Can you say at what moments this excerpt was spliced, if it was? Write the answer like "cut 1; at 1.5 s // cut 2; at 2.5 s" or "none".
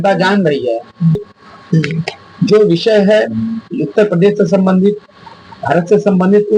cut 1; at 1.2 s